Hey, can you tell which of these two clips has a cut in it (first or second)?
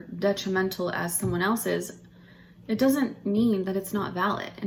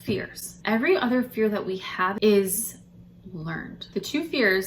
second